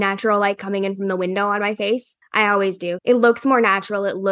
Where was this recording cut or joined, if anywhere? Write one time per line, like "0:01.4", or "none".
0:02.6